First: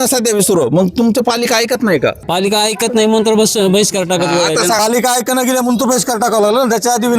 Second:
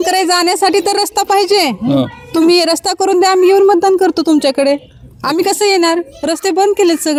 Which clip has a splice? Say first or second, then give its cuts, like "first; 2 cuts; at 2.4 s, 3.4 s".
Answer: first; 2 cuts; at 2.2 s, 4.8 s